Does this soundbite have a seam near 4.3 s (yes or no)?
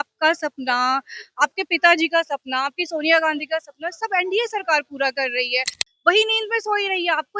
no